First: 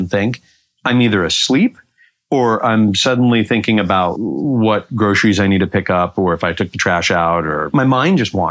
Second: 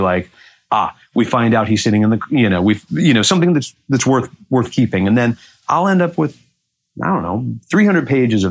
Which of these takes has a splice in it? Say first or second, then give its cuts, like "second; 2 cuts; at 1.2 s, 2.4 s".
first; 2 cuts; at 4.1 s, 7.7 s